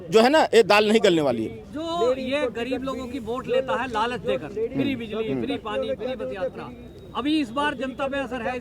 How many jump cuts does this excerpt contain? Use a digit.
0